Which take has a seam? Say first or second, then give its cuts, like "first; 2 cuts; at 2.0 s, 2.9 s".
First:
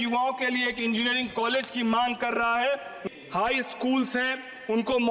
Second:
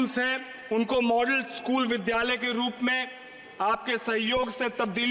first; 1 cut; at 2.9 s